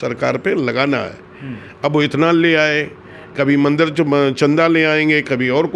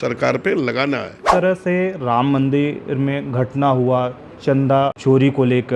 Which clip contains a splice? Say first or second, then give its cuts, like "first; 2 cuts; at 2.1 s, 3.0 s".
second; 2 cuts; at 1.3 s, 5.0 s